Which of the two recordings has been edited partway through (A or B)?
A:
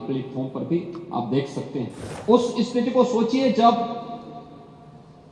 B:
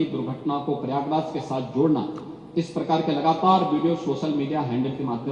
A